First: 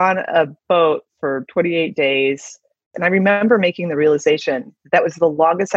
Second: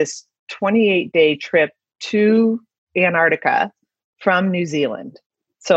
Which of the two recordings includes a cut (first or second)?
first